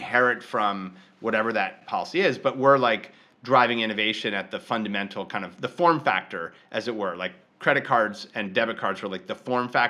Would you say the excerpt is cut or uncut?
cut